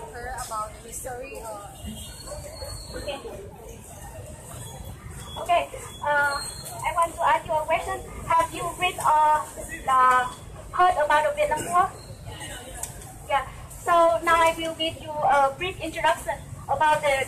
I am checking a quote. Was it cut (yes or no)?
yes